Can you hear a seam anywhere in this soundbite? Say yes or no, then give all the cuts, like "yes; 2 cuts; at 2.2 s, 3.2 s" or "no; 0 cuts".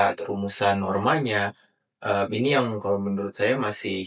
no; 0 cuts